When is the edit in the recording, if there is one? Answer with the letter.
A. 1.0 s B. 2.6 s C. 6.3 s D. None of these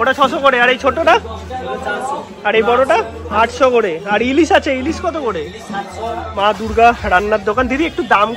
C